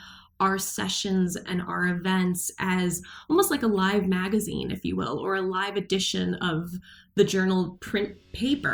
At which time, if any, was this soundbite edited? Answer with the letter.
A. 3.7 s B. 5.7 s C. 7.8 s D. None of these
C